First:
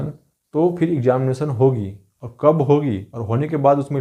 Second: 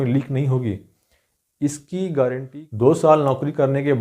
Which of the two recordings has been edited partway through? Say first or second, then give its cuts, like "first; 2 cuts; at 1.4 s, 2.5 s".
second; 1 cut; at 2.5 s